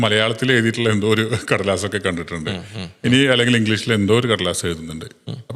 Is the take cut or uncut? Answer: uncut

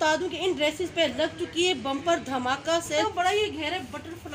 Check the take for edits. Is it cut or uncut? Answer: cut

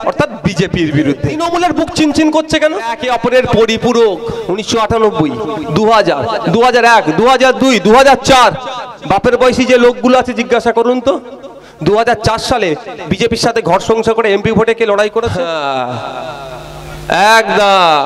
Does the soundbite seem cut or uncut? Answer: cut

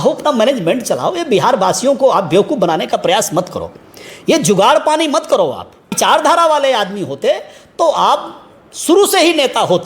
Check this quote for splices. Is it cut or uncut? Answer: cut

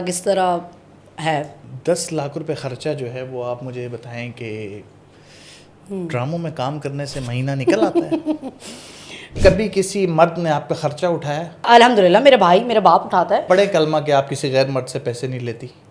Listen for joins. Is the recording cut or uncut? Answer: cut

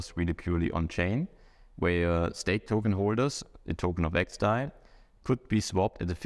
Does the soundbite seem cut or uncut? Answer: uncut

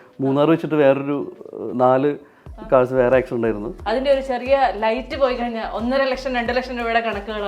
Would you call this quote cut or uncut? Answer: cut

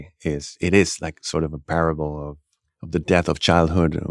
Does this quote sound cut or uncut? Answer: uncut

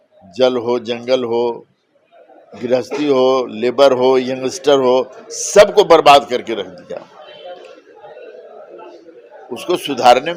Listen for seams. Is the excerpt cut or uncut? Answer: uncut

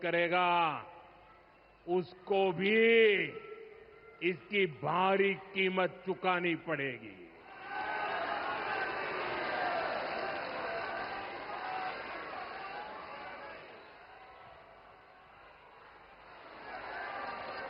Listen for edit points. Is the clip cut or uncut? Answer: uncut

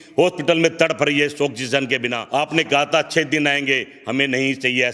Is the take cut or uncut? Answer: cut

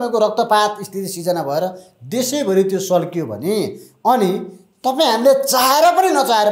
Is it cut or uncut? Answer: uncut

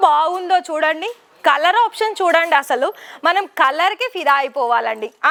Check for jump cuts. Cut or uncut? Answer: uncut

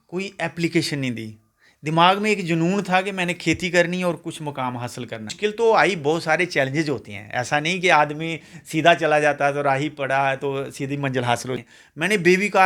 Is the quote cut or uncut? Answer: cut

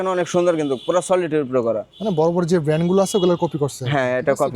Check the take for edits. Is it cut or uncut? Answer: uncut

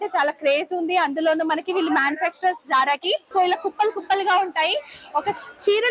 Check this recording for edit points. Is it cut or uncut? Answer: cut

